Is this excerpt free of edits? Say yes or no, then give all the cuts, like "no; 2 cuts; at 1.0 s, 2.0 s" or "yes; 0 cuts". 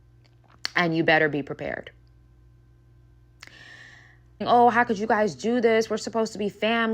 no; 1 cut; at 4.4 s